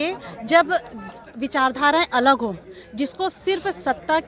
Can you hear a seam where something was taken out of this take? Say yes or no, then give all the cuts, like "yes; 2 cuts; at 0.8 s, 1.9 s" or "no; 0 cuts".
no; 0 cuts